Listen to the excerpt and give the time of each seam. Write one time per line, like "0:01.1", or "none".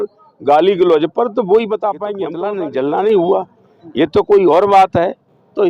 0:02.3

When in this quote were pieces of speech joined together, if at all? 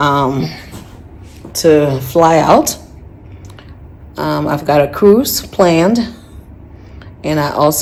none

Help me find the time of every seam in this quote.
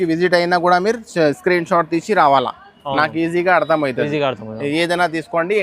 none

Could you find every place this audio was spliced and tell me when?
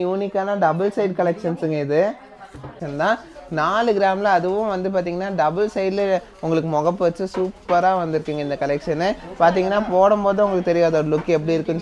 0:02.8

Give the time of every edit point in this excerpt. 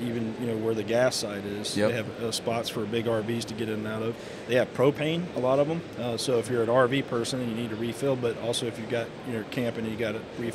none

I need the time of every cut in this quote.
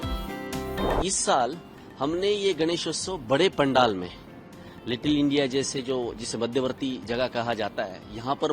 0:01.0

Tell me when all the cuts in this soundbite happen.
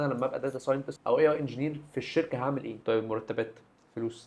0:00.9
0:02.8

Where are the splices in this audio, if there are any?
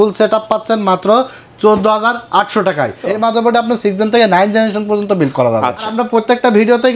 0:03.1
0:05.9

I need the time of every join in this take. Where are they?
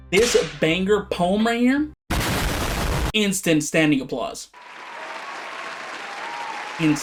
none

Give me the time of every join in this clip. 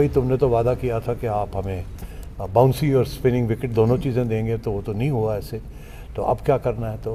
none

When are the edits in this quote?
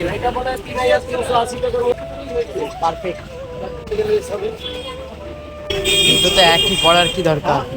0:01.9

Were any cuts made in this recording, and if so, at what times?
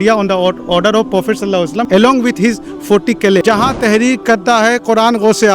0:03.4

